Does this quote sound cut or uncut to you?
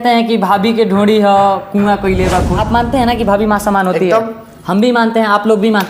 cut